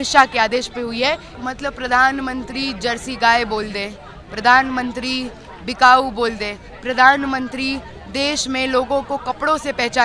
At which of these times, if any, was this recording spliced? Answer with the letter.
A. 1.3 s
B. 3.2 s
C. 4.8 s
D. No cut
A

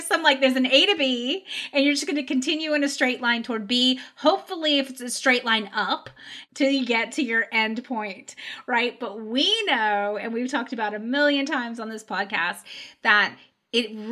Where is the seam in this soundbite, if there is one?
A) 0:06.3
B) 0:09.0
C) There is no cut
A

